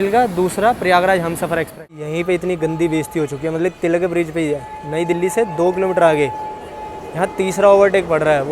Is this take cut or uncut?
cut